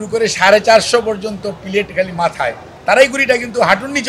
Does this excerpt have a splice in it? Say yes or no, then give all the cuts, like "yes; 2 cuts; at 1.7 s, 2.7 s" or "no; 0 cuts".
yes; 1 cut; at 2.7 s